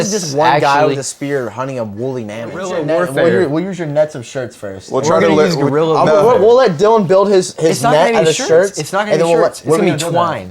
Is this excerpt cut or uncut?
cut